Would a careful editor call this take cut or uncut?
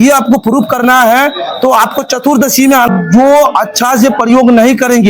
cut